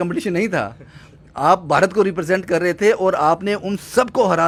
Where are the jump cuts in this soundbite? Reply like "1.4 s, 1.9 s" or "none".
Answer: none